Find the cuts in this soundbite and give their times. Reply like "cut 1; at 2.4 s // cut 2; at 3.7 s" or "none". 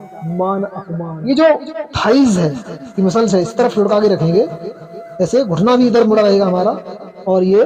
cut 1; at 1.1 s